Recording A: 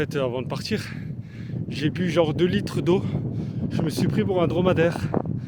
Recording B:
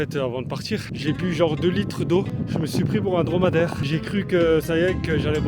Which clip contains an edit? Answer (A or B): B